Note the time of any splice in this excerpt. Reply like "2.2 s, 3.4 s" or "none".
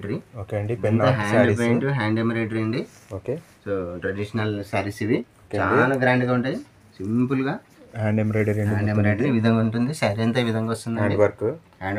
5.3 s